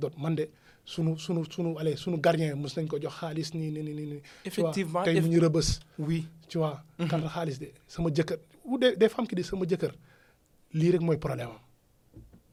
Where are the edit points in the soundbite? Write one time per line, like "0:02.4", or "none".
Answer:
none